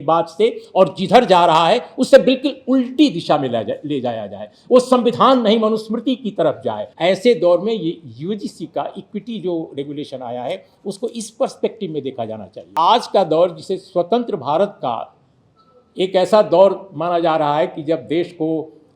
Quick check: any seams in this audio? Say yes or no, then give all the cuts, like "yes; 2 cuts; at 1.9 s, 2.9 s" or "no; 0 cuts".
yes; 2 cuts; at 6.8 s, 12.7 s